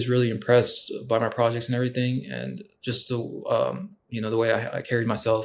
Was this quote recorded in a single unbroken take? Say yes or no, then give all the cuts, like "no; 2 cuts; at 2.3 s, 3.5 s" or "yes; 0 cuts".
yes; 0 cuts